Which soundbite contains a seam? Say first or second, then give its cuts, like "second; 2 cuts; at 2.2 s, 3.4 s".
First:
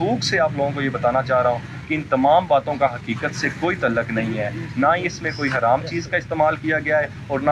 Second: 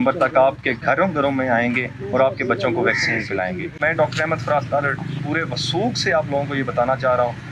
second; 1 cut; at 3.8 s